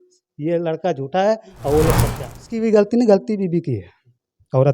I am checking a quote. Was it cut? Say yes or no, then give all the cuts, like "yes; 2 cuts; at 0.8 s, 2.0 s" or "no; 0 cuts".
yes; 1 cut; at 2.5 s